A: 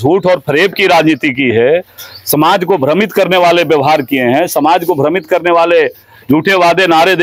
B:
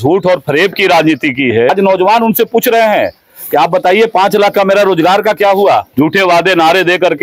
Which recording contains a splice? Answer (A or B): B